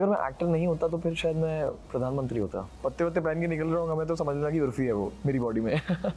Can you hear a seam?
yes; 1 cut; at 2.7 s

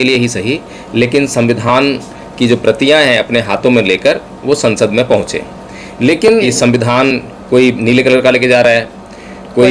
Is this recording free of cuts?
no; 1 cut; at 6.5 s

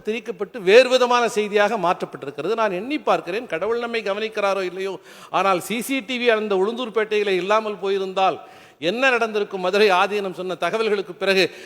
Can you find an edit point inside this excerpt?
no; 0 cuts

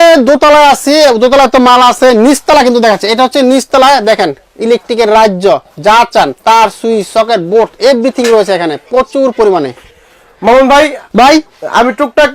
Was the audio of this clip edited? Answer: no; 0 cuts

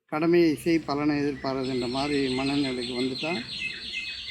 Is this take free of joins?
yes; 0 cuts

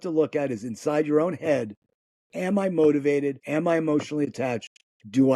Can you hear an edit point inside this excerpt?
yes; 1 cut; at 3.4 s

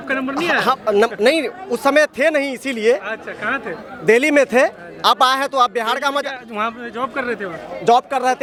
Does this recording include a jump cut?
no; 0 cuts

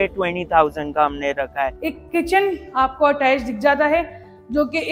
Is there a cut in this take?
yes; 1 cut; at 1.9 s

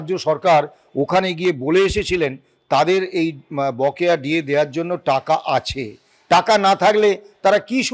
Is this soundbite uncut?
yes; 0 cuts

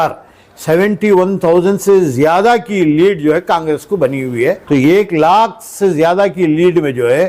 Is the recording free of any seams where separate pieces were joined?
no; 1 cut; at 4.6 s

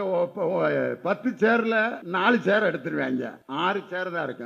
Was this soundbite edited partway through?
yes; 2 cuts; at 2.0 s, 3.6 s

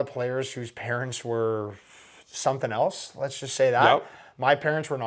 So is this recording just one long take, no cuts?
yes; 0 cuts

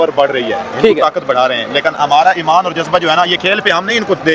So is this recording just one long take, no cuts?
yes; 0 cuts

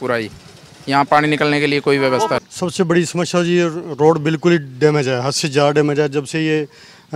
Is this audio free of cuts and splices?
no; 1 cut; at 2.4 s

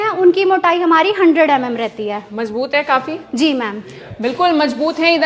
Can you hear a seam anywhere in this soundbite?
no; 0 cuts

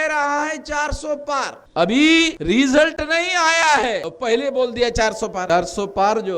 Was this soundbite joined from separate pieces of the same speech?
yes; 4 cuts; at 1.6 s, 2.4 s, 4.1 s, 5.5 s

